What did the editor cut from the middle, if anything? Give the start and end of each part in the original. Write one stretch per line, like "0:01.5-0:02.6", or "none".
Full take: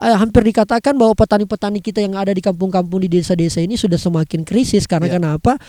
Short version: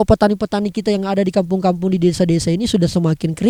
none